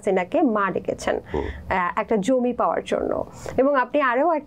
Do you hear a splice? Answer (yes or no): no